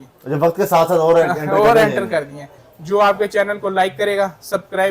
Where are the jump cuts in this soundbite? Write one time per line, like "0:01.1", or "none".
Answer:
0:02.5